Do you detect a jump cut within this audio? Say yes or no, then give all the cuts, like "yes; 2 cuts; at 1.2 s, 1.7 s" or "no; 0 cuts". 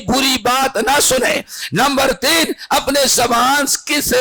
no; 0 cuts